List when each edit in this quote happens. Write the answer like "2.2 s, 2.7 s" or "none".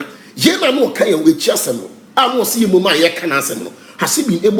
none

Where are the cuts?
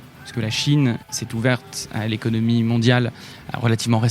1.0 s

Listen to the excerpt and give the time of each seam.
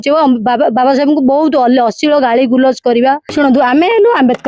3.3 s

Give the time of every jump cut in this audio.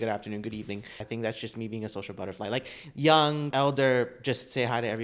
1.0 s, 3.5 s

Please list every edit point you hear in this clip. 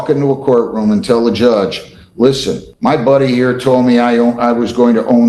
2.7 s

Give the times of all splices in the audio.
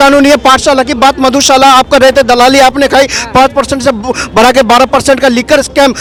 none

